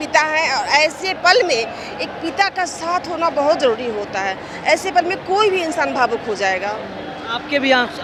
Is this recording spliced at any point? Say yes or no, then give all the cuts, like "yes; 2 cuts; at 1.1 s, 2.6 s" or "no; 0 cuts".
no; 0 cuts